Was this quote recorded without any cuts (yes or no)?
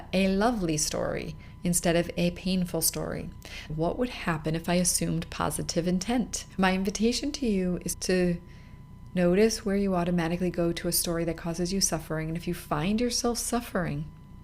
no